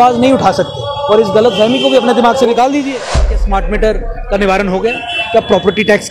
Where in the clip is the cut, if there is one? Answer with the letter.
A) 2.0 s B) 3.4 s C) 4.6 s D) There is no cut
B